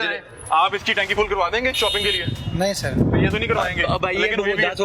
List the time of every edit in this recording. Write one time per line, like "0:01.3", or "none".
none